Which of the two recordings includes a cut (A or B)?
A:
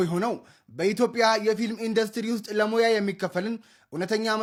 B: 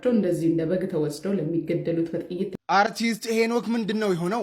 B